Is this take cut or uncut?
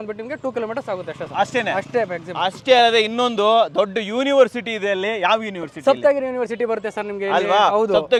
uncut